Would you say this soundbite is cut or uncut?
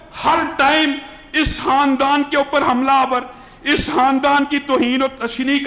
uncut